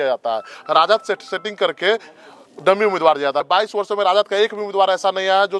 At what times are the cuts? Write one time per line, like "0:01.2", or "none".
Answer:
0:03.4